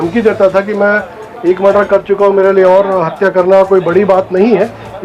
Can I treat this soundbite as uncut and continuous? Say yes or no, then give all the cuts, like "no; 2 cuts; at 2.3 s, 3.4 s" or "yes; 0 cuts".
yes; 0 cuts